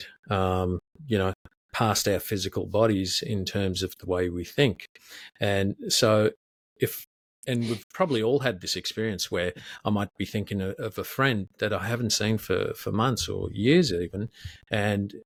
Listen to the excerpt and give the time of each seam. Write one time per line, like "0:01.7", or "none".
none